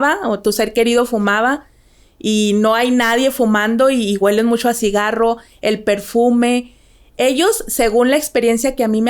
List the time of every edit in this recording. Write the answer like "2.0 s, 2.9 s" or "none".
none